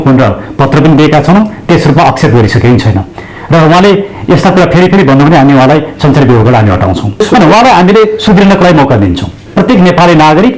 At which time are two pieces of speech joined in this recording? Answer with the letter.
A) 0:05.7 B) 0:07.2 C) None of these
B